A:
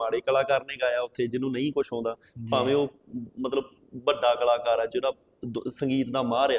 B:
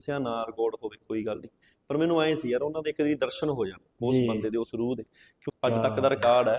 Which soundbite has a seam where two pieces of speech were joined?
B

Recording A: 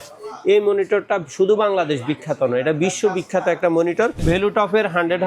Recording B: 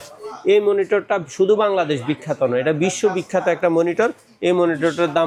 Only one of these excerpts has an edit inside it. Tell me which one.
A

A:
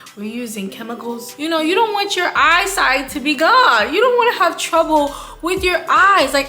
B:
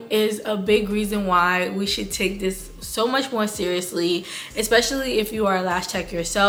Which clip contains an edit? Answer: A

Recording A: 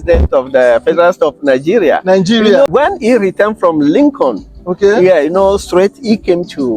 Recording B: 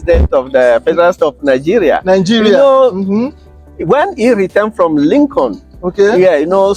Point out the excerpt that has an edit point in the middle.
A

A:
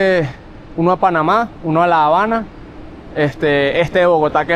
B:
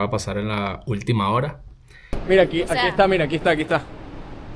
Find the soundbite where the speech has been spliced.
B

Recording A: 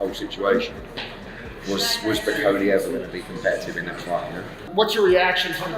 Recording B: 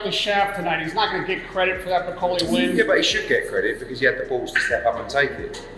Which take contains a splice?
A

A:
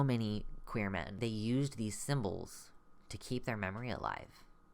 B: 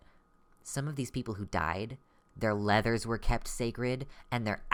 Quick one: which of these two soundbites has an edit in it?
A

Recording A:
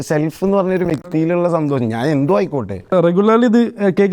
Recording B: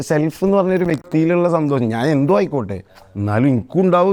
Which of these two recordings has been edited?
A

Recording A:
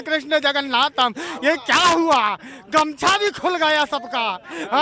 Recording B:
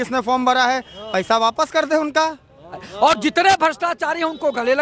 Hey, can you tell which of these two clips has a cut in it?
B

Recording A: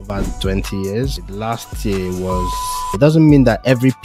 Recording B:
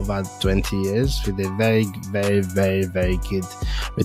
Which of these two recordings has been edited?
A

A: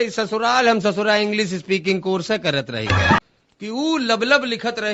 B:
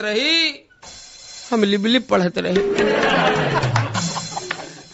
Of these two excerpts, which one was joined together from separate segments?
A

